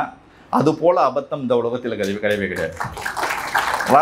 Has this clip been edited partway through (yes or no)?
no